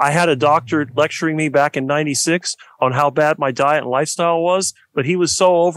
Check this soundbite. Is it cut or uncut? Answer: uncut